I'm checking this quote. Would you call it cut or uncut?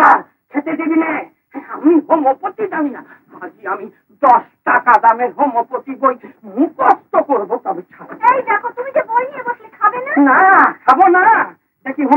uncut